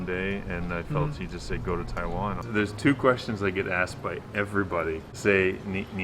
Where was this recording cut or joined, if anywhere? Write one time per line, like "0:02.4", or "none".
0:02.4